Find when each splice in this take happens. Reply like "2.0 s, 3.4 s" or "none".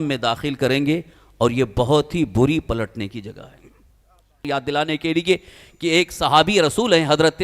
4.5 s